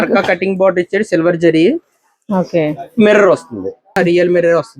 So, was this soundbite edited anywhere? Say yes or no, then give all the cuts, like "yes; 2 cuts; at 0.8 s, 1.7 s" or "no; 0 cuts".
yes; 1 cut; at 3.9 s